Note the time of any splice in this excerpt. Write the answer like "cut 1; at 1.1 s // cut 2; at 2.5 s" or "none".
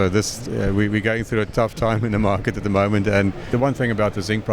cut 1; at 3.5 s

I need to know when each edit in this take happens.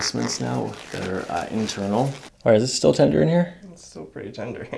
cut 1; at 2.2 s

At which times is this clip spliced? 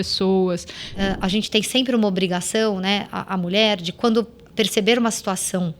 cut 1; at 0.9 s

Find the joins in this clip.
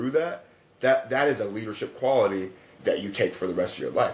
cut 1; at 2.7 s

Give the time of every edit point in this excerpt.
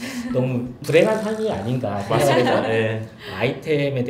none

